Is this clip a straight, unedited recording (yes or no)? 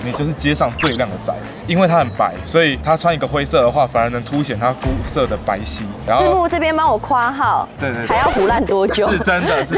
yes